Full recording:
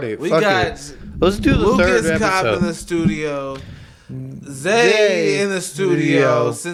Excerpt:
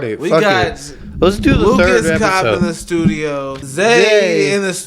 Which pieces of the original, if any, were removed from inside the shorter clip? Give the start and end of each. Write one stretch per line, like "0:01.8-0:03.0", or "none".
0:03.6-0:04.5